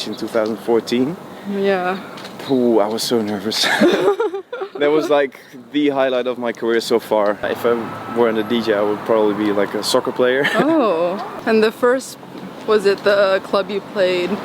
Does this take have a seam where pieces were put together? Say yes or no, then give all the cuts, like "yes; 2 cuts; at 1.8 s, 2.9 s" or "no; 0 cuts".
yes; 2 cuts; at 7.4 s, 11.3 s